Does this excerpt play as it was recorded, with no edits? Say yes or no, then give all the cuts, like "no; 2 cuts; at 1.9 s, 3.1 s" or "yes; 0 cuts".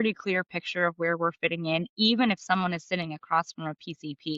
yes; 0 cuts